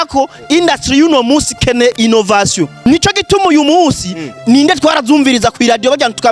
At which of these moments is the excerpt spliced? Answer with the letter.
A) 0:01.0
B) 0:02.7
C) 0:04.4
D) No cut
B